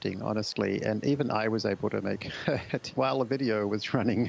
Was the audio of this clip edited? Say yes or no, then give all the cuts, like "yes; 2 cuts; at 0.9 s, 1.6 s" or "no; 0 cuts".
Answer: yes; 1 cut; at 2.9 s